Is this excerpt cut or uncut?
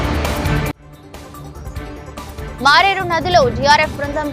cut